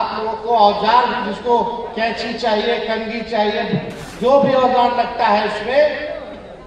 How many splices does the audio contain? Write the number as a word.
one